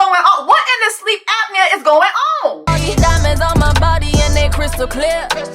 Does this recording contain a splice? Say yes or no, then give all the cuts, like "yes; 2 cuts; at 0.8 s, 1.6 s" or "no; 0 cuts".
yes; 1 cut; at 2.6 s